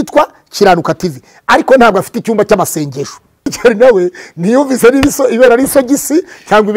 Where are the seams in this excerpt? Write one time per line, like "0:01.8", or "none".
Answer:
0:03.5